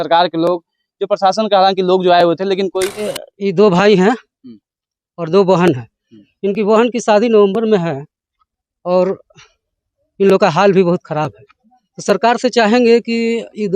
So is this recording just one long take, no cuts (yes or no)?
no